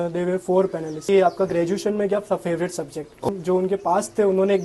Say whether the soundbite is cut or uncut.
cut